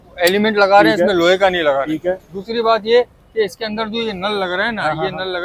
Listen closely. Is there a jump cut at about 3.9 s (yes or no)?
no